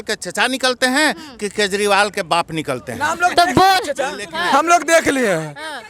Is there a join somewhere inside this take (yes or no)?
no